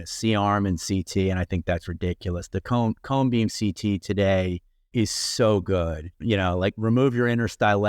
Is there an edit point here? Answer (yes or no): yes